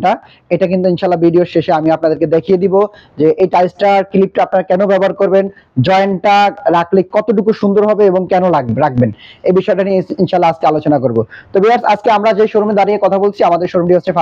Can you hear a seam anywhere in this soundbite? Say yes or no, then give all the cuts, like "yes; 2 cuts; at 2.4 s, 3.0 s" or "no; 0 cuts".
no; 0 cuts